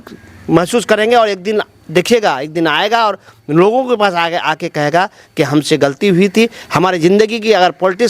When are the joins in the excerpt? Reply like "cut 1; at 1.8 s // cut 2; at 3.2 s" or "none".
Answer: none